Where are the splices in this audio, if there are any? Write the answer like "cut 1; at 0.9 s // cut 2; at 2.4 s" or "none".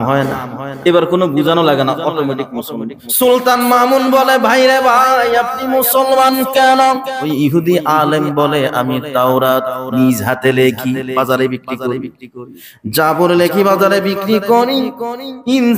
cut 1; at 3.0 s // cut 2; at 7.2 s